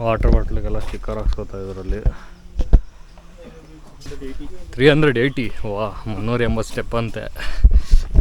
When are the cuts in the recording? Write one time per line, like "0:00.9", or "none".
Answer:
0:04.1

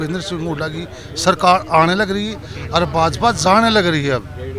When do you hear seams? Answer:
none

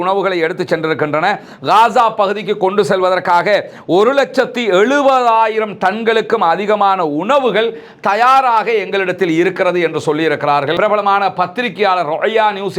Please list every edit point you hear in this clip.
0:10.8

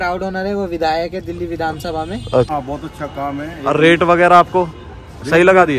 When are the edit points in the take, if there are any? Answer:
0:02.5

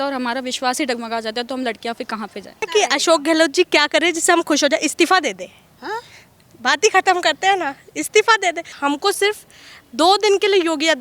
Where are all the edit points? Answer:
0:02.7
0:08.7

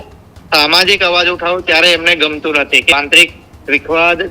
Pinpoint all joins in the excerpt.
0:02.9

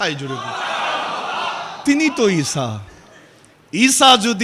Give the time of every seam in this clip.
none

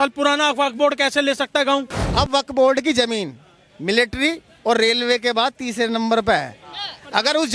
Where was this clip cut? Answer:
0:02.1

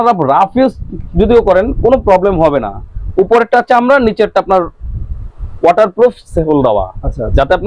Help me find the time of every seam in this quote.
none

